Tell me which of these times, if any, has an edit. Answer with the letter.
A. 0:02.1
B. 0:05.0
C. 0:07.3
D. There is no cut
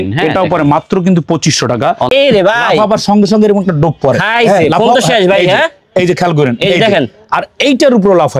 A